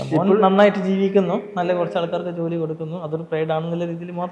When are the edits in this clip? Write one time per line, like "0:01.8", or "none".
none